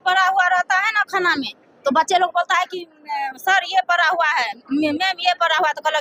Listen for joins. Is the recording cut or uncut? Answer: uncut